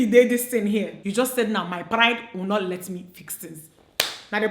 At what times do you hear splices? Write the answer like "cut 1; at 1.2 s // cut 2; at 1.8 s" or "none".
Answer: cut 1; at 1.0 s